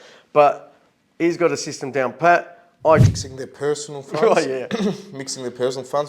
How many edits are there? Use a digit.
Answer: 1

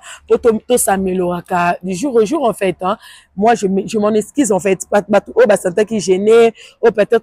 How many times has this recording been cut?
0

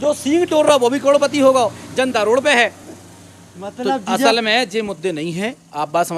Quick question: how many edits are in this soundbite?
0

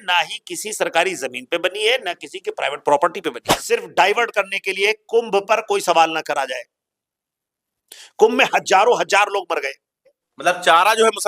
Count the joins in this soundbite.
2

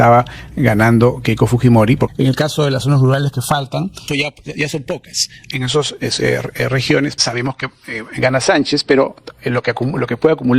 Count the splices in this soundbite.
4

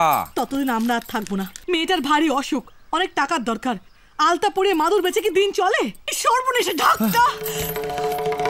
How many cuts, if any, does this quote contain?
2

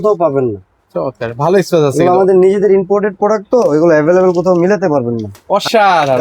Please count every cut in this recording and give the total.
1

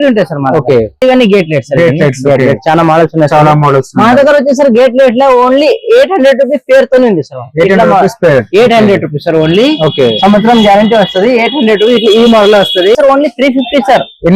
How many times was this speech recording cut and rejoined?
2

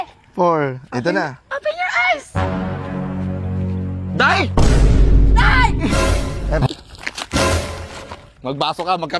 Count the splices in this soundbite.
1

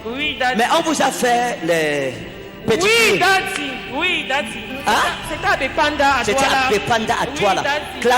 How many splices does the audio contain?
0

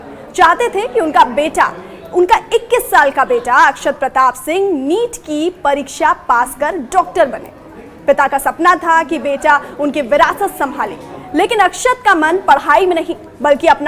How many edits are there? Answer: 0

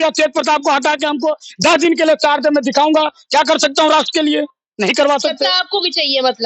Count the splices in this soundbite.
0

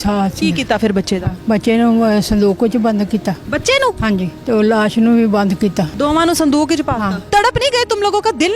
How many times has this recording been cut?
4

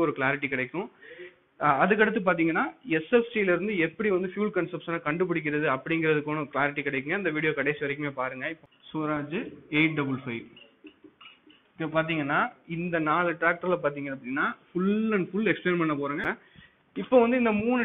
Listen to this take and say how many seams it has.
2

